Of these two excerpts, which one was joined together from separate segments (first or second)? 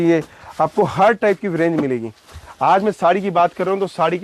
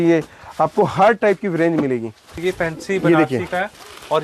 second